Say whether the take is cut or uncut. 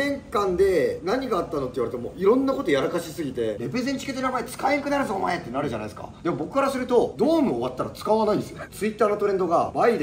cut